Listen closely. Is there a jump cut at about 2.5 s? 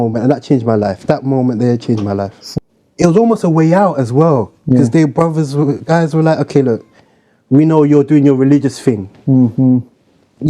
yes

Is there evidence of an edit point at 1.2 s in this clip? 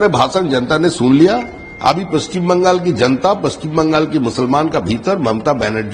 no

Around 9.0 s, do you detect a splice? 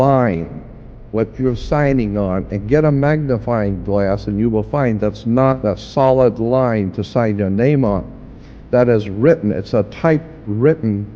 no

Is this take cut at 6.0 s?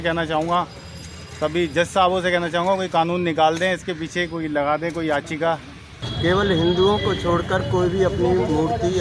yes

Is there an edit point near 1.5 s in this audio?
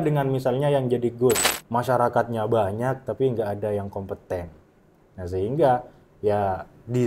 yes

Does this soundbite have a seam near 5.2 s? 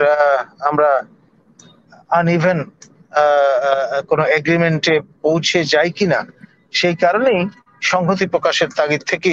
no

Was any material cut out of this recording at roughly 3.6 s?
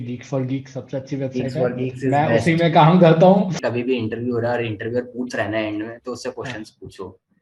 yes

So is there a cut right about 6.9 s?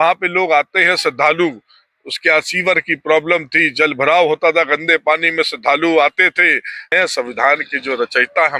yes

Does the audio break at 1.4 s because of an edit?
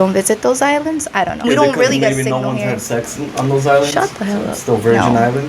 yes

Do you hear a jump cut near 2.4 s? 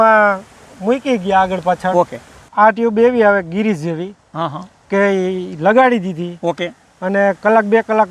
yes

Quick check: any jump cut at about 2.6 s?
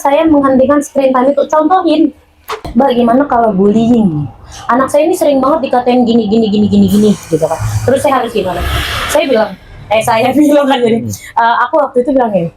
yes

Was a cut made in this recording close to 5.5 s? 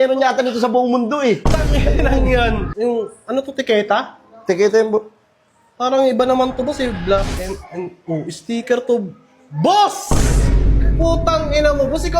no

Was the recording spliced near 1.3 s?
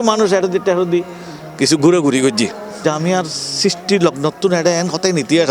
no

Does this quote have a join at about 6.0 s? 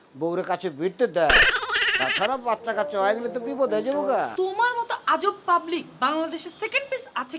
no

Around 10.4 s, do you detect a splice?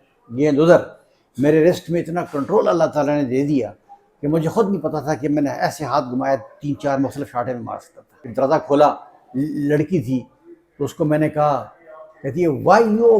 no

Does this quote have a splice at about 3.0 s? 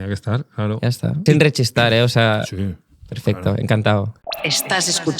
no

